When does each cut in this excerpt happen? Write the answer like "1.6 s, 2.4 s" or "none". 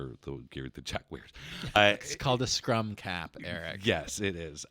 1.8 s